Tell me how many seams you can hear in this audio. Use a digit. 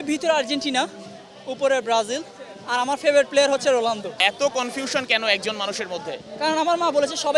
1